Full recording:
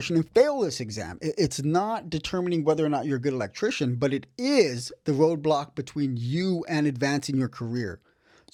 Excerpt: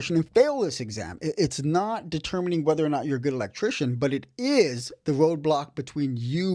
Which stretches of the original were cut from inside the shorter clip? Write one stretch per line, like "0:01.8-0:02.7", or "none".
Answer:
none